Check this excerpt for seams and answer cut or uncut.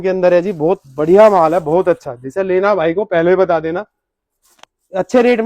uncut